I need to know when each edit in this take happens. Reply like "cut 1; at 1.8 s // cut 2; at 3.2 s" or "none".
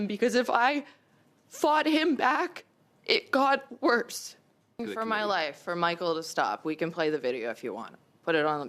cut 1; at 4.9 s